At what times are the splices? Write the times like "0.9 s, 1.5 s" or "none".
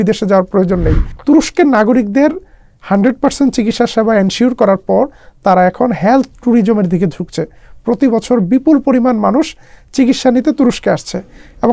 1.1 s